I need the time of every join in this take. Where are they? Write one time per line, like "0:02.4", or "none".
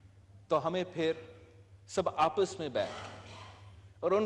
none